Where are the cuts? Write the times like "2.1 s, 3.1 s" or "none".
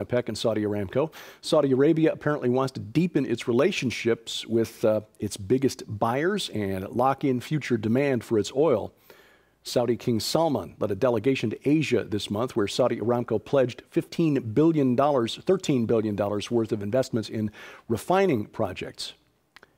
7.2 s